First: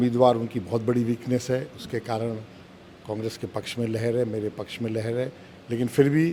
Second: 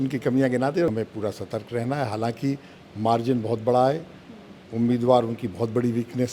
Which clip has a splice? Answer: second; 1 cut; at 0.9 s

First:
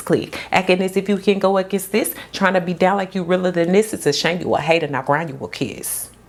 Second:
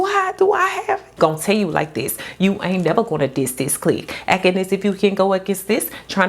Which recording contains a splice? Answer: second; 1 cut; at 1.1 s

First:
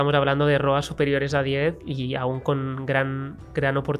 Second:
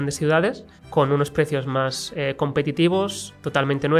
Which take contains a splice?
first; 1 cut; at 1.8 s

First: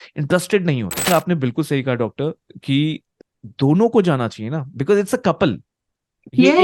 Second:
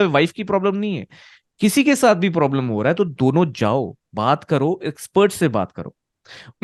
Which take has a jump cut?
first; 2 cuts; at 1.1 s, 3.1 s

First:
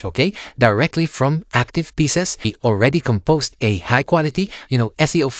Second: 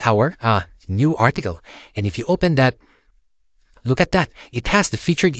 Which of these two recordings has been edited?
first; 1 cut; at 2.5 s

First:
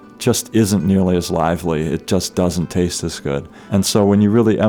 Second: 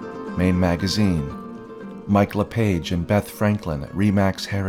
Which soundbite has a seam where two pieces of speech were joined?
first; 1 cut; at 3.5 s

